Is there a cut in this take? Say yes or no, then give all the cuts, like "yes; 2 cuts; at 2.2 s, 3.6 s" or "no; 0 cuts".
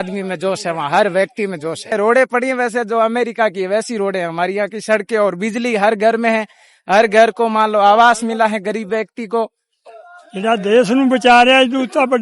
yes; 2 cuts; at 1.9 s, 9.7 s